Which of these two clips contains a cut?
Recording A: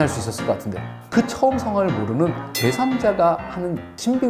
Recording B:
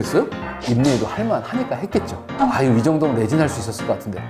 A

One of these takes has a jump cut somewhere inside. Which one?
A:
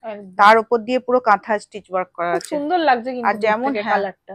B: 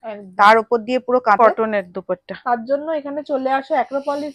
B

